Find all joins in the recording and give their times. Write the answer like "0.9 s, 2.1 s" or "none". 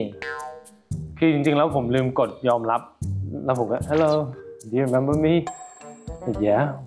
3.0 s

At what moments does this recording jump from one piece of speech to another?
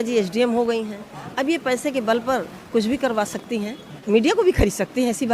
3.9 s

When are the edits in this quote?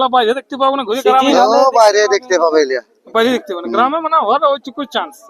none

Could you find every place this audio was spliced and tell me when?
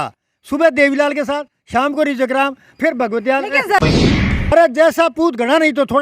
4.1 s

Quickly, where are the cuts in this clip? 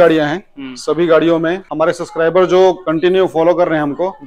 1.6 s, 2.9 s

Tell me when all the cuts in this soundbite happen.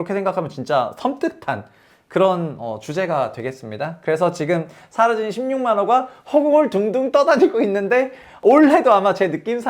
8.4 s

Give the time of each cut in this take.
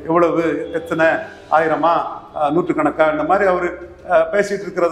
none

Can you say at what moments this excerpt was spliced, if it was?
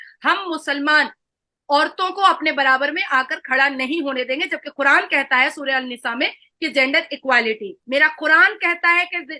7.8 s

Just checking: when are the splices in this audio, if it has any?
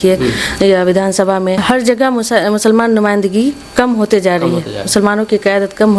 1.6 s

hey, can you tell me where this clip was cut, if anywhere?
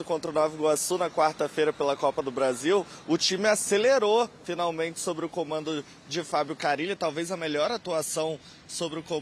none

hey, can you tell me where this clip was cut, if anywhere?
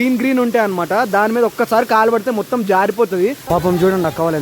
3.4 s

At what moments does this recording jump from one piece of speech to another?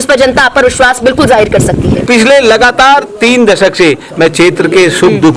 2.0 s

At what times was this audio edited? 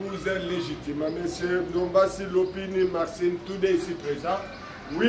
none

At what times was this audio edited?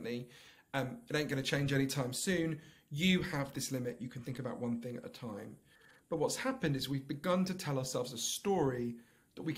none

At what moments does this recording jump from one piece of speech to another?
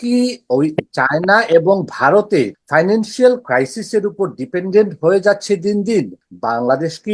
2.6 s, 6.2 s

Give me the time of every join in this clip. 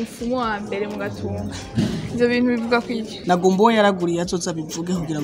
3.2 s

